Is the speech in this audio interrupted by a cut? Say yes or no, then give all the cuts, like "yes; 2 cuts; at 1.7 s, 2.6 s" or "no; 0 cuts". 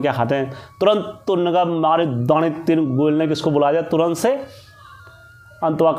no; 0 cuts